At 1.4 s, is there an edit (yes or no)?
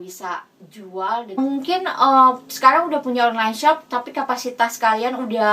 yes